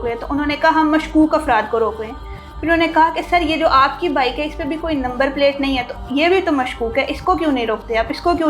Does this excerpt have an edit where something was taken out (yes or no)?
no